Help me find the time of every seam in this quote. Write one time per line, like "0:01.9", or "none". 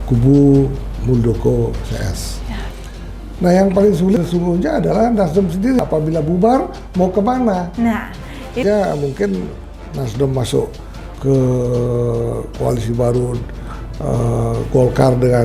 0:02.7
0:08.6